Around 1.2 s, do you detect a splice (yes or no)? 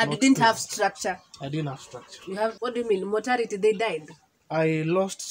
no